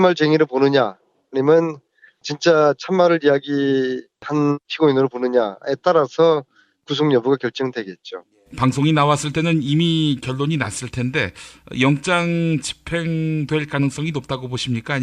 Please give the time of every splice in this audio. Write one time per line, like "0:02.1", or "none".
none